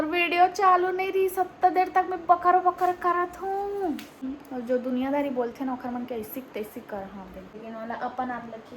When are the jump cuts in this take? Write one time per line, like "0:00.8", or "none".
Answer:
0:04.2
0:07.5